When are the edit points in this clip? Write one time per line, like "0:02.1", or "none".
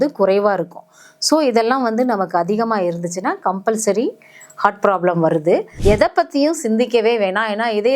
0:05.7